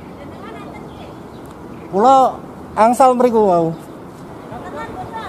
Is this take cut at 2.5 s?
no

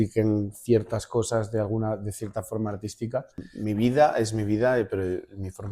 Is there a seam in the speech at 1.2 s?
no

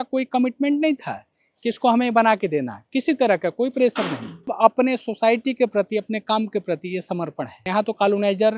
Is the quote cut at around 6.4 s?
no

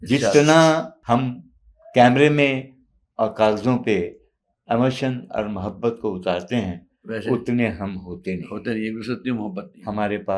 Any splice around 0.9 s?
yes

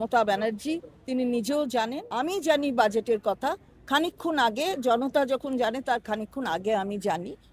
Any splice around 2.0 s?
yes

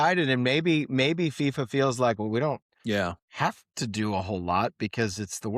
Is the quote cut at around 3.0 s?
yes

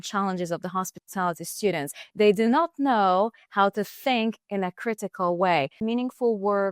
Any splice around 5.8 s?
yes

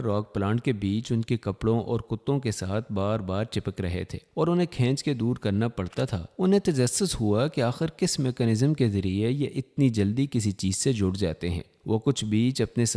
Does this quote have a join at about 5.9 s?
no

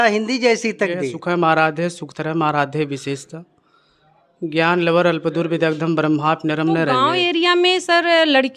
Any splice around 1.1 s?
yes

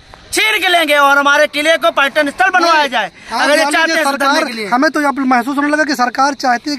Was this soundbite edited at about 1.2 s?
no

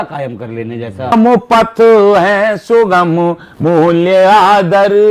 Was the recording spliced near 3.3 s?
no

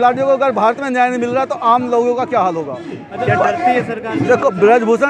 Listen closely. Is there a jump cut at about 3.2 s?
yes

